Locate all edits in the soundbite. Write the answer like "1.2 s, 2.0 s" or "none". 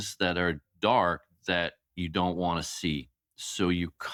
none